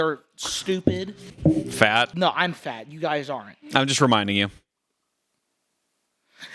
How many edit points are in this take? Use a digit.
2